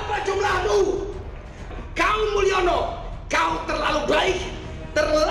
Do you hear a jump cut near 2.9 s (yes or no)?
no